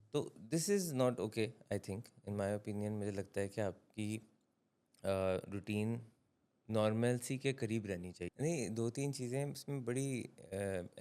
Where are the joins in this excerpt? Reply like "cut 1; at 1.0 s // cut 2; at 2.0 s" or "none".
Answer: cut 1; at 8.1 s